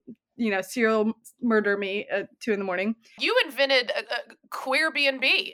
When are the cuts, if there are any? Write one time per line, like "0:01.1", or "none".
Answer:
0:03.2